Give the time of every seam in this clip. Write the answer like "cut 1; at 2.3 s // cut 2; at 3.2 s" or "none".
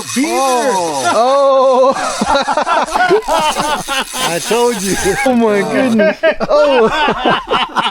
cut 1; at 5.3 s

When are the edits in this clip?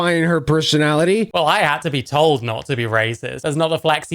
cut 1; at 1.3 s

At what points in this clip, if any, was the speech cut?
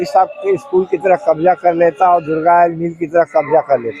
none

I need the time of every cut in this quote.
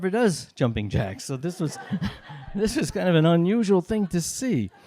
none

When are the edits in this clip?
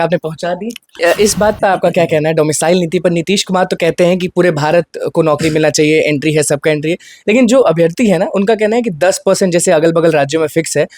cut 1; at 1.0 s

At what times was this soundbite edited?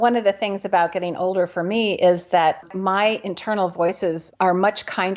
none

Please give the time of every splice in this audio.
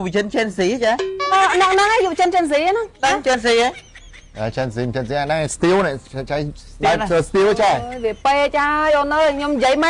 none

